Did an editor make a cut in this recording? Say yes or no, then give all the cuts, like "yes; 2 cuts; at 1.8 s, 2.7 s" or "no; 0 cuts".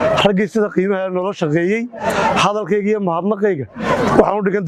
no; 0 cuts